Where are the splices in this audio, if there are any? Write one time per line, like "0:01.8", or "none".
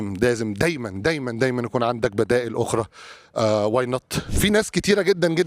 0:04.3

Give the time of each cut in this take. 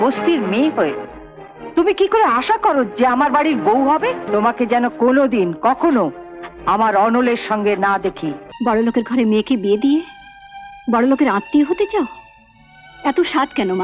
0:04.2
0:08.4

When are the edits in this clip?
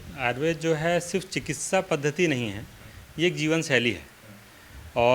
none

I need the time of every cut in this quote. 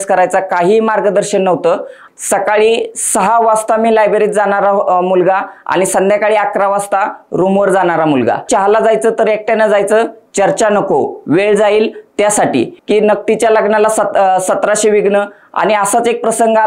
0:02.0
0:08.5
0:12.8

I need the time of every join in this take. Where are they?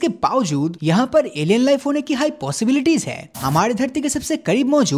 0:03.4

